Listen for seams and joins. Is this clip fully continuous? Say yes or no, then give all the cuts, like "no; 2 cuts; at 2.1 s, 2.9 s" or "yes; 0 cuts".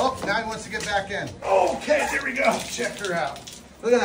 no; 1 cut; at 1.3 s